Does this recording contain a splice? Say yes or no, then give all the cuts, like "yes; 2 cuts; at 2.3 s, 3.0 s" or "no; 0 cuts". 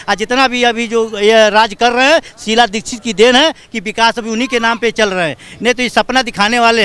no; 0 cuts